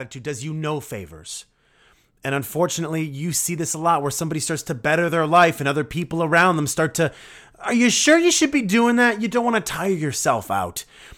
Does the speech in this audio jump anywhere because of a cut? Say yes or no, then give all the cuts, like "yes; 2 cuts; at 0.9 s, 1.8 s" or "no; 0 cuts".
no; 0 cuts